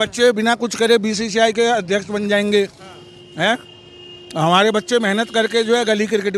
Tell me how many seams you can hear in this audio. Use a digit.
0